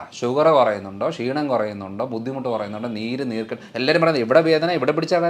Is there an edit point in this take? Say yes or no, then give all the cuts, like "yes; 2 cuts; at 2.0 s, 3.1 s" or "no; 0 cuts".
no; 0 cuts